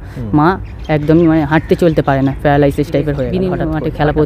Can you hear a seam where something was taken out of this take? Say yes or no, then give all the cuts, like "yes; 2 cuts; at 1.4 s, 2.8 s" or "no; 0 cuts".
yes; 1 cut; at 3.3 s